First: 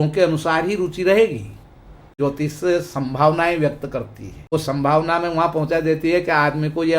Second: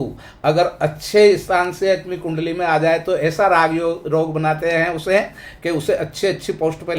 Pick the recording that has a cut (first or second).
first